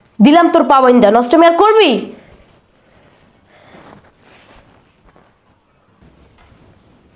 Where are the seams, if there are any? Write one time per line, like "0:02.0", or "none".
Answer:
0:05.9